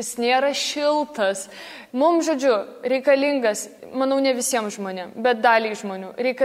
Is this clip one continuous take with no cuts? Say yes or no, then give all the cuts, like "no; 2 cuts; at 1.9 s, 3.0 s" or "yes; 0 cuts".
no; 2 cuts; at 1.7 s, 3.8 s